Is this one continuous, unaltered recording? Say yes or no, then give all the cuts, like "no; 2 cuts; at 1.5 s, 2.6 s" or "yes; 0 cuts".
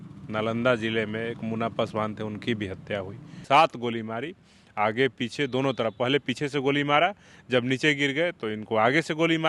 no; 1 cut; at 3.3 s